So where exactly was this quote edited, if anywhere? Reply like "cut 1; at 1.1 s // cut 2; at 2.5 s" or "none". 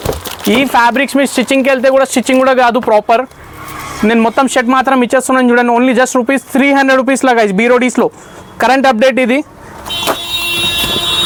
none